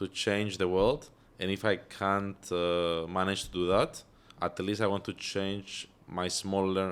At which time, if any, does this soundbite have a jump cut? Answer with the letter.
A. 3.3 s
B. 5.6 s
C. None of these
C